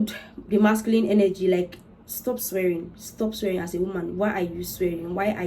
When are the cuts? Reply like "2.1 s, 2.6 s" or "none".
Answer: none